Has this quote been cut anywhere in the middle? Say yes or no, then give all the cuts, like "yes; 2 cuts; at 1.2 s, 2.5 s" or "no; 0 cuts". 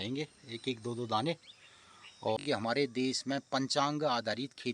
yes; 1 cut; at 2.4 s